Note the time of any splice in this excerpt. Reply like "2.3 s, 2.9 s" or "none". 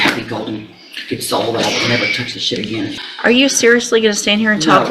3.0 s